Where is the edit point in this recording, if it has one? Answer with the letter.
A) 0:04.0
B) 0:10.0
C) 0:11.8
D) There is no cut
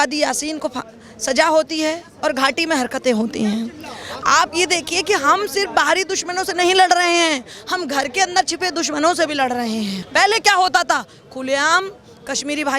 B